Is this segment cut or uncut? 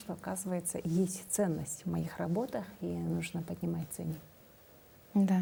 uncut